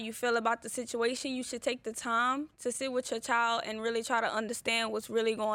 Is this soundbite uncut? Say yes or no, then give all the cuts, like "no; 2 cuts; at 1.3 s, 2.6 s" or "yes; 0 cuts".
yes; 0 cuts